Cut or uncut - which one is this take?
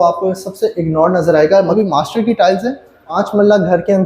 cut